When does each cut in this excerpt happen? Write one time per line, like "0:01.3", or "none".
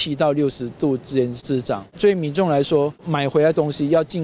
0:01.6
0:03.1